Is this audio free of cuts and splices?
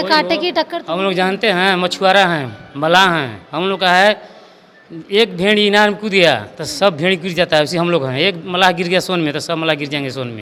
yes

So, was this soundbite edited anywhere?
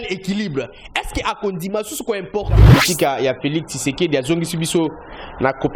yes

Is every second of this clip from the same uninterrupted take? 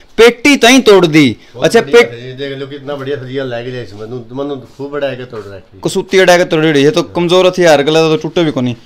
yes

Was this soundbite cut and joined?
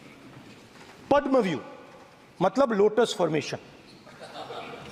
no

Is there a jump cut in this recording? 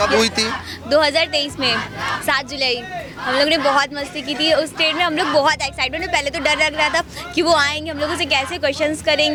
no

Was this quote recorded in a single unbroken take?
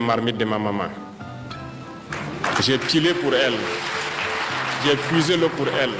yes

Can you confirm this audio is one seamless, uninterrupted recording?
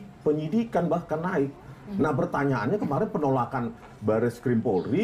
yes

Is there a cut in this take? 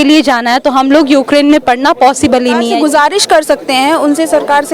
yes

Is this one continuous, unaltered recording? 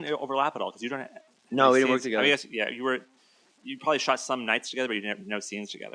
no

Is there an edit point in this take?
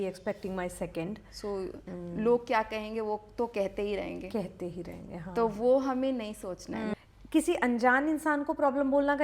yes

